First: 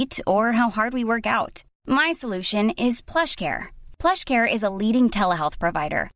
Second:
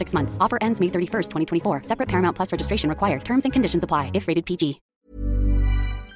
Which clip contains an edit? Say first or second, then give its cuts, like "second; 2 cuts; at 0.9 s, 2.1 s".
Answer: second; 1 cut; at 4.9 s